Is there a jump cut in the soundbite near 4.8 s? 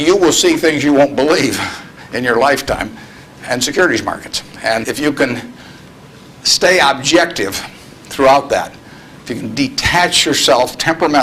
yes; 1 cut; at 4.8 s

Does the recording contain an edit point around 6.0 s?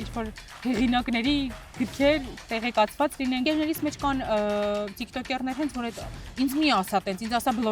no; 1 cut; at 3.4 s

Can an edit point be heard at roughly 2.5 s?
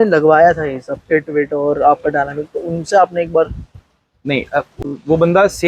no; 1 cut; at 4.7 s

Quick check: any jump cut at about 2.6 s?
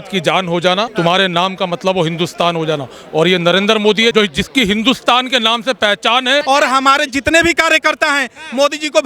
no; 3 cuts; at 0.9 s, 4.1 s, 6.4 s

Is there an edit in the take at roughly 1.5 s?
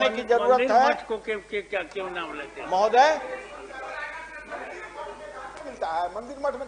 no; 0 cuts

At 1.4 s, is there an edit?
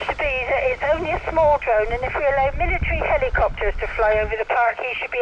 no; 0 cuts

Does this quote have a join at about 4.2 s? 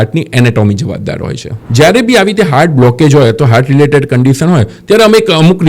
no; 1 cut; at 1.5 s

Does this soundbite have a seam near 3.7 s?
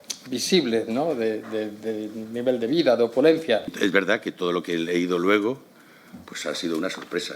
yes; 1 cut; at 3.7 s

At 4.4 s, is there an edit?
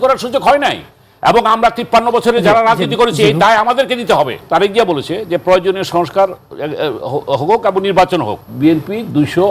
yes; 2 cuts; at 4.4 s, 8.4 s

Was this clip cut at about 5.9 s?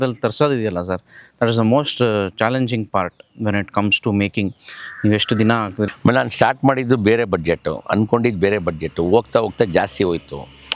yes; 1 cut; at 5.9 s

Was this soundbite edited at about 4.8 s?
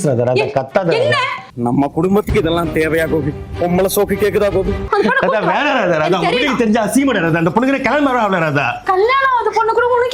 yes; 1 cut; at 4.8 s

